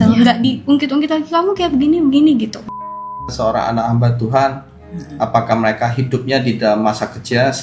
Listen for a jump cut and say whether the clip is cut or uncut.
cut